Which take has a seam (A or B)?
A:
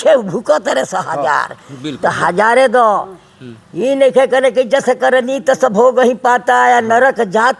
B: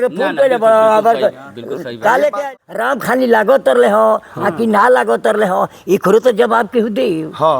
B